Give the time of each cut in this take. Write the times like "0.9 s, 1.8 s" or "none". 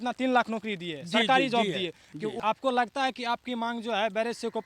2.3 s